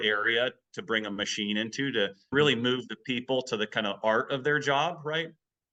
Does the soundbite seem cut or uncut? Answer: uncut